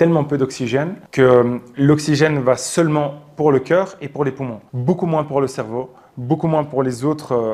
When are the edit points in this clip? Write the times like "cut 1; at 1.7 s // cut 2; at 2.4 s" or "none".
none